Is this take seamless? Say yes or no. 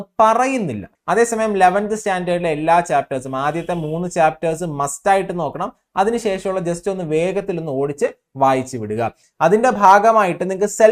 no